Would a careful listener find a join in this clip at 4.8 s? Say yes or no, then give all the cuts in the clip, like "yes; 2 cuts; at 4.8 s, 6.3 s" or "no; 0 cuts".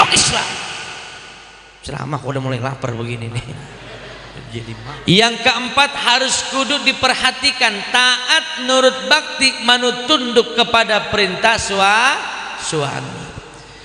yes; 1 cut; at 4.8 s